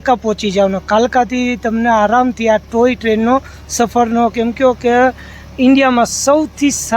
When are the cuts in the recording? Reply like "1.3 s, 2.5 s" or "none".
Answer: none